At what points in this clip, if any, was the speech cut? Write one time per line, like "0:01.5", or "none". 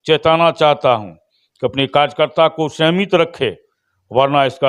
none